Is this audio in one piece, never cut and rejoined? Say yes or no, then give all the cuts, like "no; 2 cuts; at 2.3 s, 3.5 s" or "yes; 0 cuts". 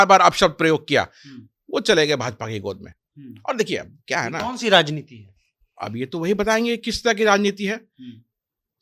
yes; 0 cuts